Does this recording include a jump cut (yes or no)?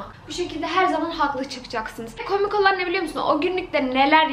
no